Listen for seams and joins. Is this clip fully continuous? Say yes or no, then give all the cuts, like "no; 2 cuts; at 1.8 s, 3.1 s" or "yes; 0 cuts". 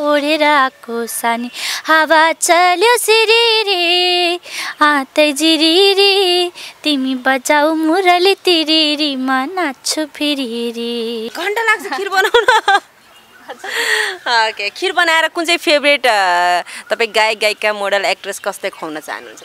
no; 1 cut; at 11.3 s